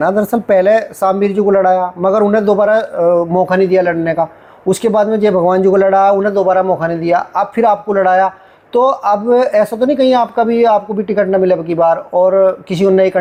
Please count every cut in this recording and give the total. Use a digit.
0